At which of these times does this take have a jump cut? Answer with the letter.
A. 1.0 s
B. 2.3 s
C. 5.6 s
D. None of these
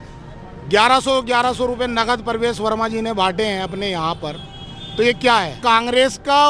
C